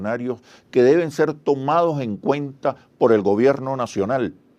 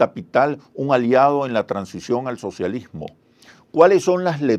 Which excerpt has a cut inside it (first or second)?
second